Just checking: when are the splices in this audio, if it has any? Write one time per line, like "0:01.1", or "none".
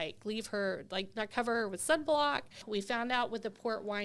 0:02.6